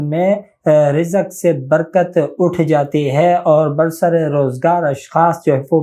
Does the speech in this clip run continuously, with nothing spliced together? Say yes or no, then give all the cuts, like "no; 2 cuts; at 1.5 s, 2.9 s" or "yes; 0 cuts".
yes; 0 cuts